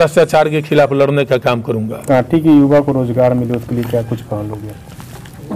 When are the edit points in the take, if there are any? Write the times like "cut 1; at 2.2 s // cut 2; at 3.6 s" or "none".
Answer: cut 1; at 2.0 s